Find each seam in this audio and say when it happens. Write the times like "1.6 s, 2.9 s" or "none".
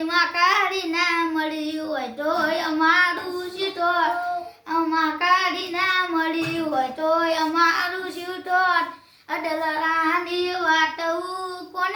none